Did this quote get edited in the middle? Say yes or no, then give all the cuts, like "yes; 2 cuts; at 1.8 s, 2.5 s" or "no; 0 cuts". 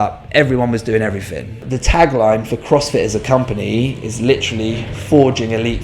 yes; 1 cut; at 1.6 s